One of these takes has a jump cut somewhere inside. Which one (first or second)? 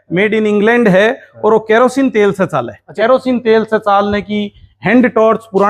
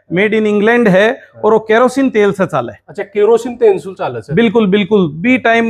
first